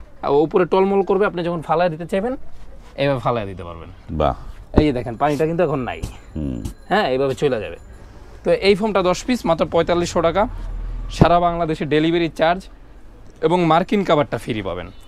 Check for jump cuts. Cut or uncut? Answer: uncut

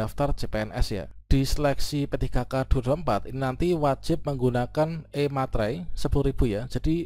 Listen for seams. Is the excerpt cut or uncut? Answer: cut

